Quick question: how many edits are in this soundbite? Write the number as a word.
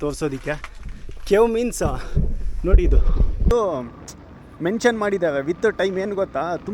one